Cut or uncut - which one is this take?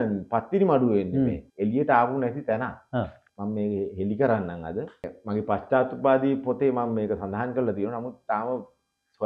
cut